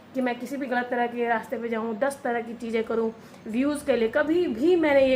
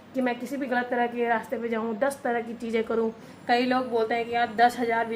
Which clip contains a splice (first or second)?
second